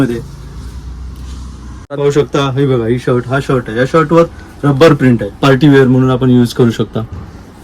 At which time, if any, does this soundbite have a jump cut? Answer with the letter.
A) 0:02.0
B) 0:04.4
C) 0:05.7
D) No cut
A